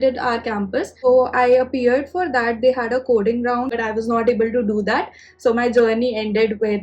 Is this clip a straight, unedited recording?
no; 2 cuts; at 0.9 s, 3.7 s

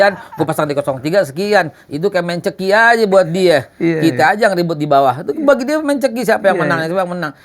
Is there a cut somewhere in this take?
no; 0 cuts

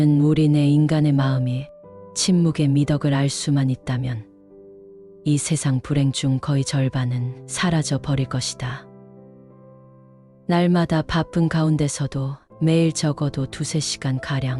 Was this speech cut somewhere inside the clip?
yes; 2 cuts; at 8.8 s, 10.4 s

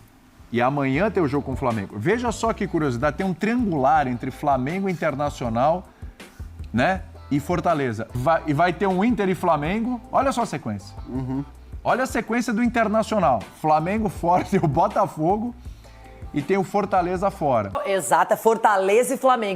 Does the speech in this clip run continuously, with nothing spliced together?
no; 2 cuts; at 8.0 s, 17.8 s

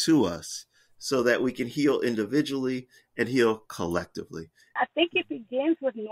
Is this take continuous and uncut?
no; 1 cut; at 4.8 s

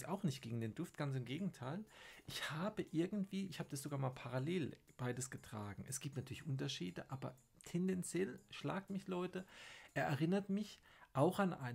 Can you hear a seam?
no; 0 cuts

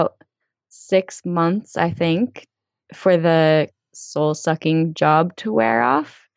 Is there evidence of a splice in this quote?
yes; 2 cuts; at 2.6 s, 3.7 s

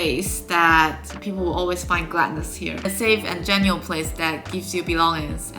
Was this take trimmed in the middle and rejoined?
yes; 1 cut; at 1.1 s

